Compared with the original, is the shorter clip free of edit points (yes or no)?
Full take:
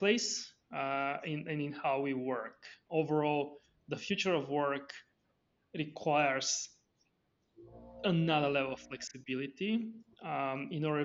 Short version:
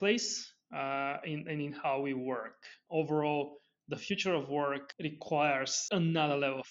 no